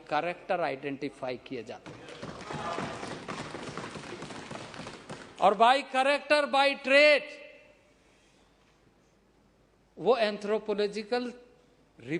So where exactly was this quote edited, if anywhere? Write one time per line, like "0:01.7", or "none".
none